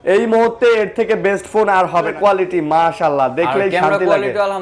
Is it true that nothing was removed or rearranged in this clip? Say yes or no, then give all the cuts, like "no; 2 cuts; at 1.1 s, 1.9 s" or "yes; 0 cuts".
no; 1 cut; at 2.1 s